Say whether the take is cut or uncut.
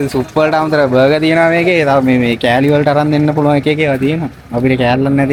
uncut